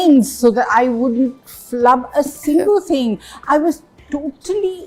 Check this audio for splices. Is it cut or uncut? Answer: uncut